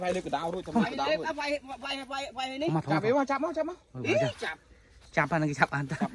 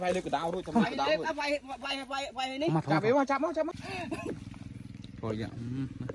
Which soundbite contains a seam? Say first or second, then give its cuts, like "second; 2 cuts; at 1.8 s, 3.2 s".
second; 1 cut; at 3.8 s